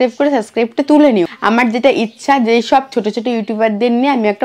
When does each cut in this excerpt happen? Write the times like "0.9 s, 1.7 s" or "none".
1.3 s